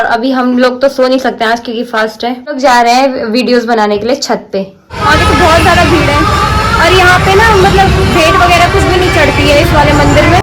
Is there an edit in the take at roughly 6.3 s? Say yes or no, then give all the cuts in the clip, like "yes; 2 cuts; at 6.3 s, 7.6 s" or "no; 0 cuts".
no; 2 cuts; at 2.6 s, 5.0 s